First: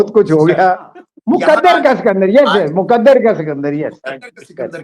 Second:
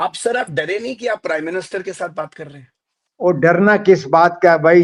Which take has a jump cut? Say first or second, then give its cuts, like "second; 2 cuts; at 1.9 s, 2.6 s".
first; 1 cut; at 1.1 s